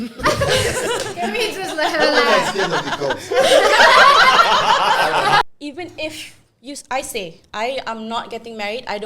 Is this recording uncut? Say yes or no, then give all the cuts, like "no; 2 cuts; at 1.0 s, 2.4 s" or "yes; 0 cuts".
no; 1 cut; at 5.4 s